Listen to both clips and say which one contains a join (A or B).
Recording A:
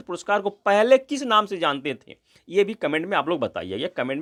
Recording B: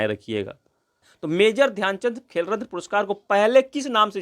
B